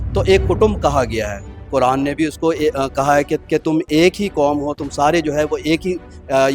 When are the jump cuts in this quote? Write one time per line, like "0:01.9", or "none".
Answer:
0:03.4